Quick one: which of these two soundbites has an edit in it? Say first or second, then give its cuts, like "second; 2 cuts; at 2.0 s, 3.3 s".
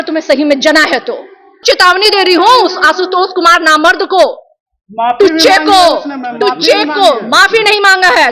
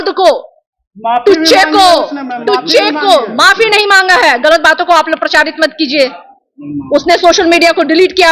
first; 1 cut; at 1.6 s